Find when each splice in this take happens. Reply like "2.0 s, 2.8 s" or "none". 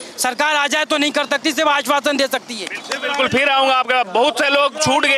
none